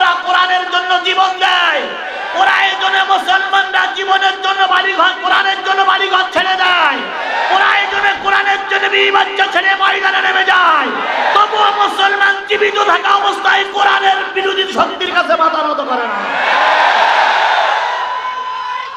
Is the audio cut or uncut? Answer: uncut